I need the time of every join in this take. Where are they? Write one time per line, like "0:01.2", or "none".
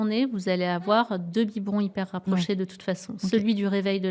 none